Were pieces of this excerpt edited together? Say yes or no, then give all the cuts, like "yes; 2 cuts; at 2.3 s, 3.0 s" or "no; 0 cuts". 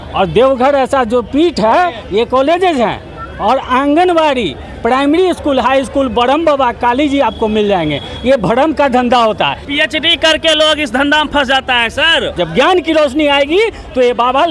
yes; 2 cuts; at 9.6 s, 12.4 s